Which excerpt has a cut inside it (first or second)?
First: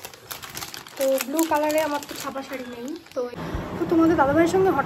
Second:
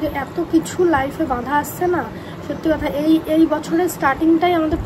first